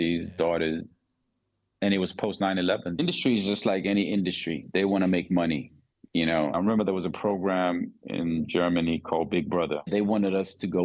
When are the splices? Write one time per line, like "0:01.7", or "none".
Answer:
0:00.9
0:03.0
0:06.5
0:09.9